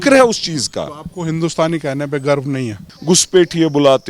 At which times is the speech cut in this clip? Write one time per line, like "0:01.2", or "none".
0:02.8